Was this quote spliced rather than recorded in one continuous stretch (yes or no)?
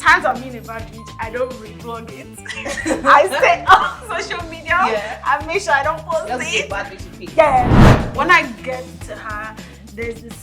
yes